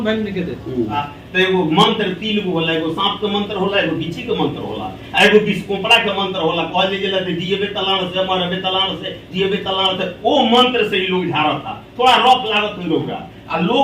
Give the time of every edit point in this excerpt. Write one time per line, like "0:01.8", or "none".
0:00.9